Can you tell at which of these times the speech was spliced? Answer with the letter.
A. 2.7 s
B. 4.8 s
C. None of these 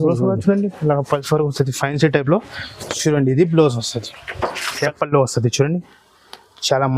B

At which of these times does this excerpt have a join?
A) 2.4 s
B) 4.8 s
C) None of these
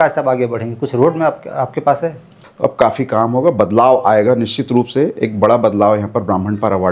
A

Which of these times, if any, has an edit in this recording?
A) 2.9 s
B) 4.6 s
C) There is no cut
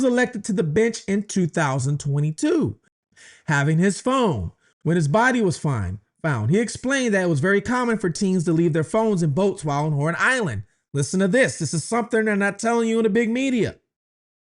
A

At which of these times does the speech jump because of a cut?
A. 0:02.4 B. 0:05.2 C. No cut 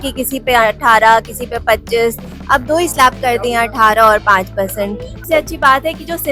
B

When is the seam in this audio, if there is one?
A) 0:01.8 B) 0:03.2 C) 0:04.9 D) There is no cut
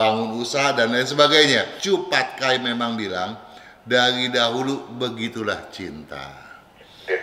A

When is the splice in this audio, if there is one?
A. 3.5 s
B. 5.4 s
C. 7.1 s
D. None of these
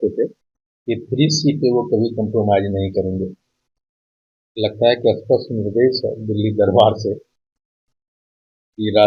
D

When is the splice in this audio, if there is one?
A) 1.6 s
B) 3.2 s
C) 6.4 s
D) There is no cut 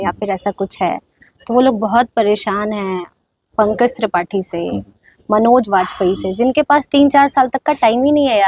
D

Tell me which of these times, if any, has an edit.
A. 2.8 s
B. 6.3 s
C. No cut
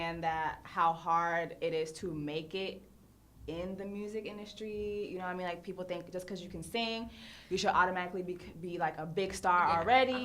A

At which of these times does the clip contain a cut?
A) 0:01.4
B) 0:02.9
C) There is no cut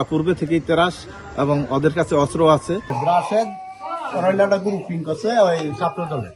B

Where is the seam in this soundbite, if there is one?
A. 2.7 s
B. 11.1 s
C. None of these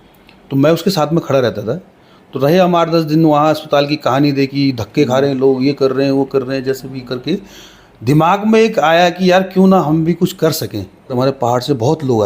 B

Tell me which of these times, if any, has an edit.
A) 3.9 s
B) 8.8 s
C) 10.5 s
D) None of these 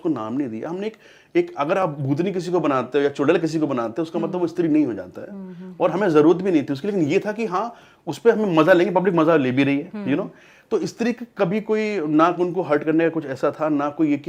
D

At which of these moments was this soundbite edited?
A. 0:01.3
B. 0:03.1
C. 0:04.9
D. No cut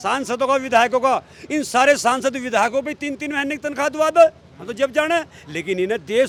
D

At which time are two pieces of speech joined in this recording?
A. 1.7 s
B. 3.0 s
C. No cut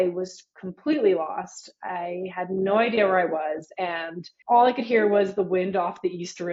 C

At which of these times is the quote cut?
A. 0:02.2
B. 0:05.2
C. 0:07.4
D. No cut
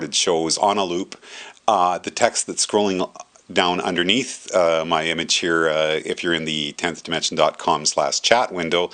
D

